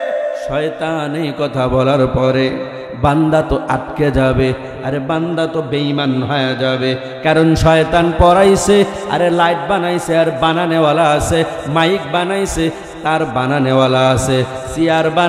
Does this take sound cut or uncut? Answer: uncut